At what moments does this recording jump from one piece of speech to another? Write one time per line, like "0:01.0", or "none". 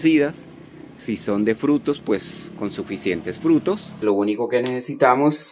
0:03.9